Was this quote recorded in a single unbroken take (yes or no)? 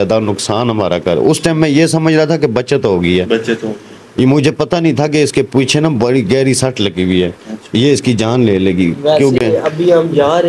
yes